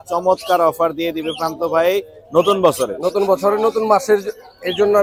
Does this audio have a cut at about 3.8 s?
no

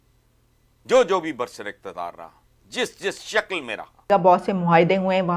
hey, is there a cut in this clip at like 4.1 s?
yes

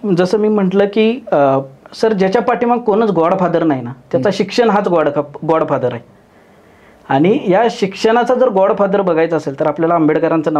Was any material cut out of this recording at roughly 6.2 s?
no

